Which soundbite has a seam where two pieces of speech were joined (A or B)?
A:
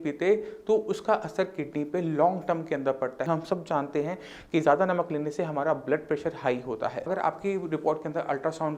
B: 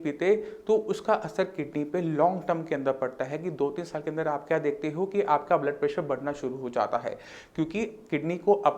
A